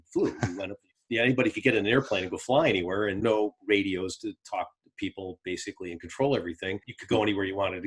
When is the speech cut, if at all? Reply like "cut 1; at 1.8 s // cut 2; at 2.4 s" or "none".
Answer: cut 1; at 3.2 s // cut 2; at 6.8 s